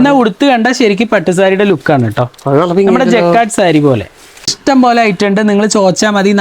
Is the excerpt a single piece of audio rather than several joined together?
no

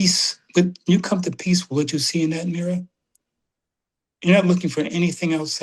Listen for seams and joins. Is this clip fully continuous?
yes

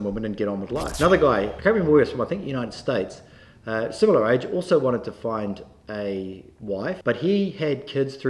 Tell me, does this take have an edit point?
yes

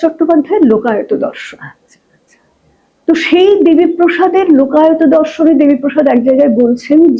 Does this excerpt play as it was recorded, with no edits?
yes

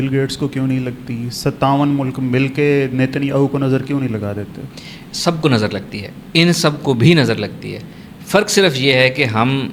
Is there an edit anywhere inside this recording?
no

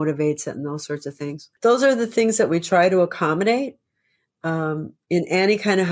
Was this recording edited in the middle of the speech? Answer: yes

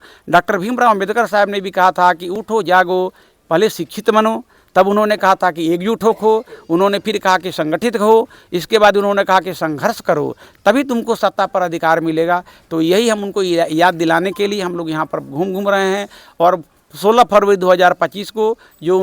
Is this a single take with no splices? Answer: yes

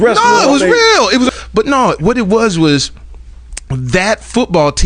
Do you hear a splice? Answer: yes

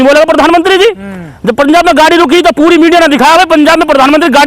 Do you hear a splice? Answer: no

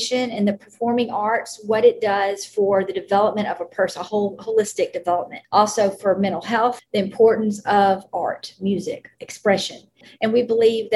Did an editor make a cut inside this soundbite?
yes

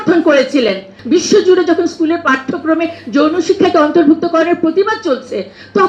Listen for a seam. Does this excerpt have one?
yes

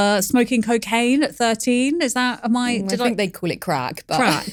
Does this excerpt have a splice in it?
no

